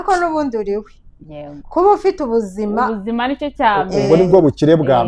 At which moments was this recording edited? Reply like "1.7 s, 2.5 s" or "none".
none